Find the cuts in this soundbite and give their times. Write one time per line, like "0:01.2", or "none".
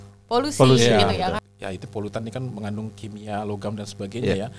0:01.4